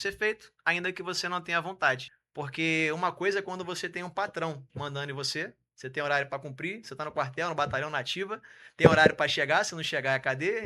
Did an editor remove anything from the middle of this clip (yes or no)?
yes